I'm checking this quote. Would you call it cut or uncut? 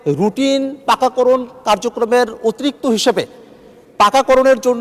uncut